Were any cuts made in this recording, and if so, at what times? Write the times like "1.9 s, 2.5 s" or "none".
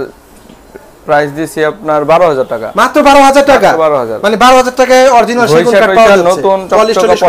none